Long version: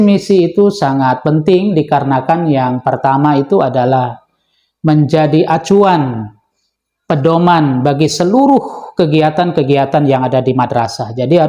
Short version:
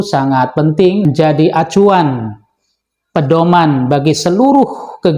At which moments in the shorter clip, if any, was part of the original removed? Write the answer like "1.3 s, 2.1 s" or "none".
1.1 s

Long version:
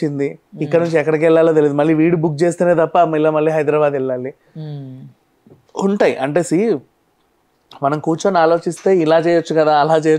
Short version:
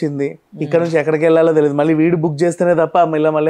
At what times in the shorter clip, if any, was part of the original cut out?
none

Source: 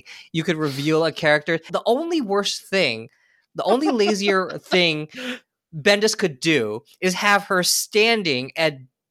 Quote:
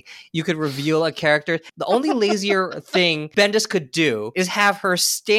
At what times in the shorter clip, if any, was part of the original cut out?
1.7 s, 3.2 s, 4.3 s

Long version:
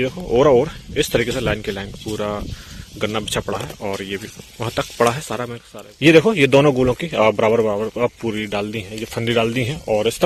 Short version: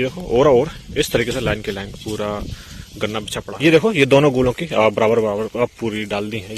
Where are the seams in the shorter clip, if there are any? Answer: 3.4 s

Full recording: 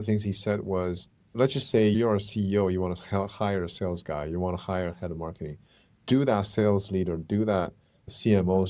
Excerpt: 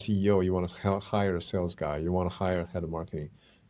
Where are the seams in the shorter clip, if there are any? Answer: none

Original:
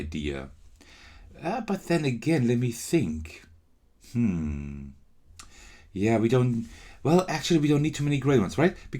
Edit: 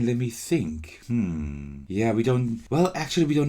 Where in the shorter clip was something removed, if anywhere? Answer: 0.9 s, 1.7 s, 2.6 s

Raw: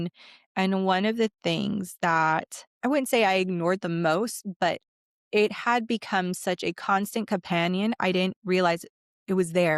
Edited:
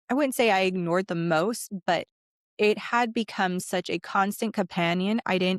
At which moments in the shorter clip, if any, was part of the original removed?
none

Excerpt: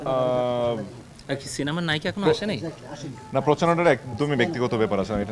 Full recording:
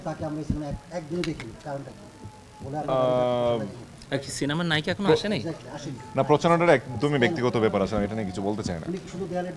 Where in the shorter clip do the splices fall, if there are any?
none

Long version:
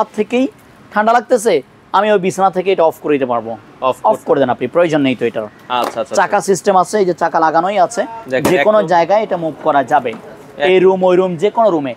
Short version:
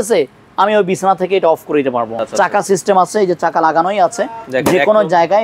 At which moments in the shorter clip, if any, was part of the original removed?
2.2 s

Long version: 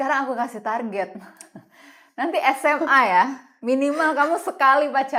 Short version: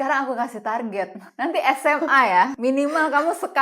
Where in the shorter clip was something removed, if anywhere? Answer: 1.2 s, 2.5 s

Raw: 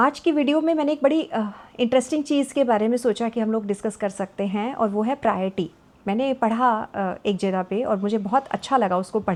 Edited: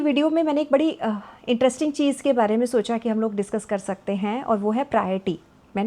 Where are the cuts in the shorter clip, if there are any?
none

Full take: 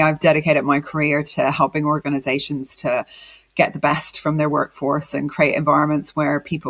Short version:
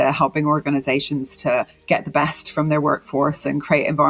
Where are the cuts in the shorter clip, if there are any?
1.8 s

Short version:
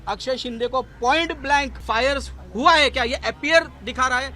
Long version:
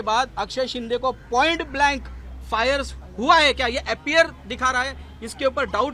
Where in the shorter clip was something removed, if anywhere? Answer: 1.8 s

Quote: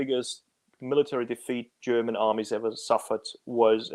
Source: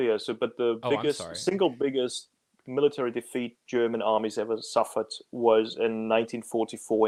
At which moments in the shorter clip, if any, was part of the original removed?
none

